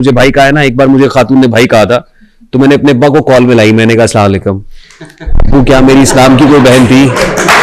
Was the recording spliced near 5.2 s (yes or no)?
no